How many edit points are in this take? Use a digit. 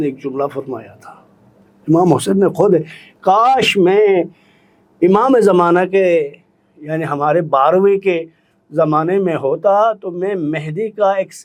0